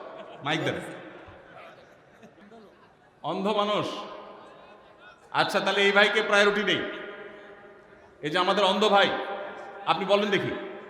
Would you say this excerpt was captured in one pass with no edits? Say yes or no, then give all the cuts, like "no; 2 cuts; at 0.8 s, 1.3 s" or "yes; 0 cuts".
no; 1 cut; at 2.4 s